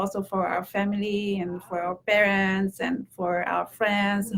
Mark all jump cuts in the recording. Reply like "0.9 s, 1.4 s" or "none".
none